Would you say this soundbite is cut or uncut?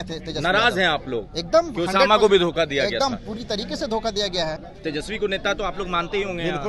cut